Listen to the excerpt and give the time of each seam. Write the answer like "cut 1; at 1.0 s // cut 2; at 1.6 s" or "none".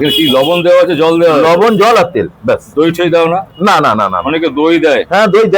none